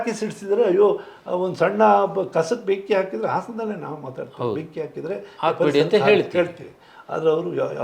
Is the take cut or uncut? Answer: uncut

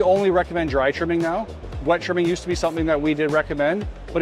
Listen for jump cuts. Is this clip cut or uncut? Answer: uncut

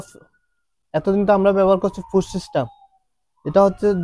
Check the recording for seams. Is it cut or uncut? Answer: uncut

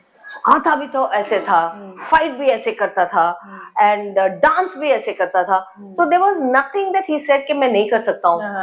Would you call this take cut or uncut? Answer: uncut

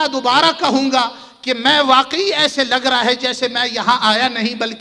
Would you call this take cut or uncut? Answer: uncut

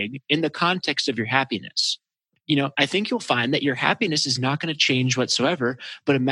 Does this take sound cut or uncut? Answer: uncut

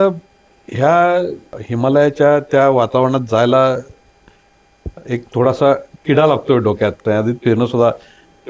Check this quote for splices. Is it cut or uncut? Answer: cut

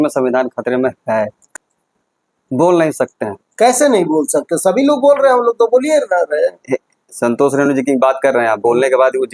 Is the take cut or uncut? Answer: cut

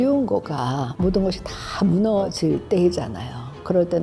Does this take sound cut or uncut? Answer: cut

